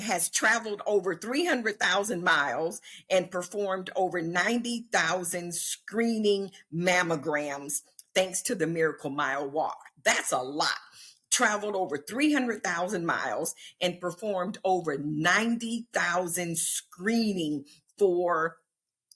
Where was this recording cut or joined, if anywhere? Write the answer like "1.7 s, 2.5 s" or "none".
none